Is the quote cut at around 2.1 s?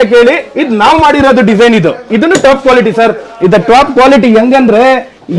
yes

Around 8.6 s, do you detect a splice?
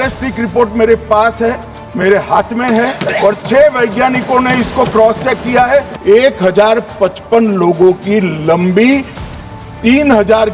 no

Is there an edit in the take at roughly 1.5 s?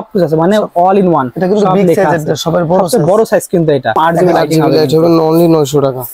no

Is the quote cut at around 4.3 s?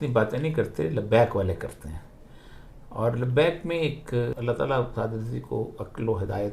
yes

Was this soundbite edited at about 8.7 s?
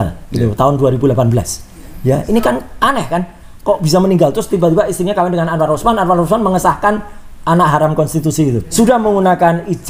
yes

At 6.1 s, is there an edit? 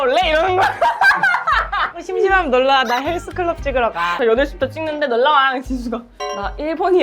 no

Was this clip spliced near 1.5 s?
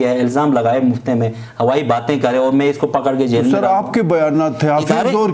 no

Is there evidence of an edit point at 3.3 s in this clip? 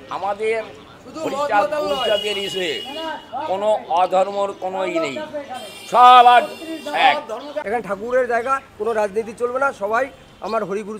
no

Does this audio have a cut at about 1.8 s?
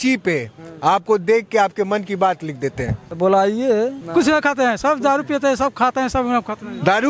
no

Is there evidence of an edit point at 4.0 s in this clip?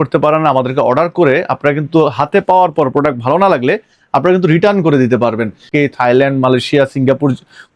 no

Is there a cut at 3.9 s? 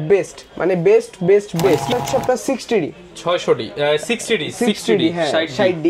no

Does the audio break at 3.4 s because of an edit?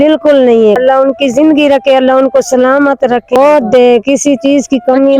yes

